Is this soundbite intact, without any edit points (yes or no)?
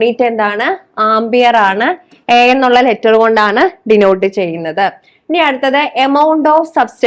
yes